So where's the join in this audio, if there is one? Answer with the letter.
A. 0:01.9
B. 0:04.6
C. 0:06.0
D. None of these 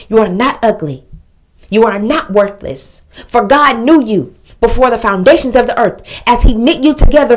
D